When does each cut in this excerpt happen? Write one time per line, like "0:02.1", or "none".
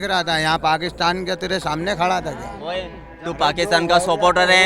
none